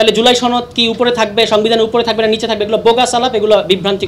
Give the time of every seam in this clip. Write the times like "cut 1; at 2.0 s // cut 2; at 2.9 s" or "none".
none